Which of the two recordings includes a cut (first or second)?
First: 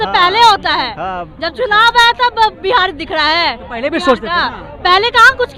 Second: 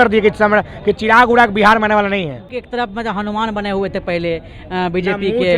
second